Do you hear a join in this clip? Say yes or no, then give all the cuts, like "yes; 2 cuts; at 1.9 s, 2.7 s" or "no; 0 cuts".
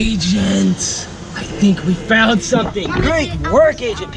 no; 0 cuts